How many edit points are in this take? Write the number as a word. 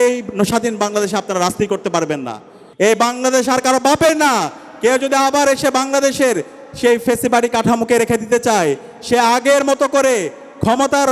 one